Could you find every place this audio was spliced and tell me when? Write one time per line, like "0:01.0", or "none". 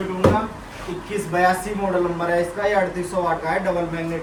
none